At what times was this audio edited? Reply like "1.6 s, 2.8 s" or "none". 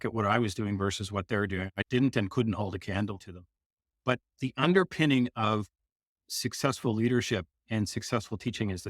1.8 s

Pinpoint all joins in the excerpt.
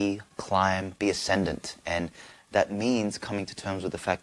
0.9 s

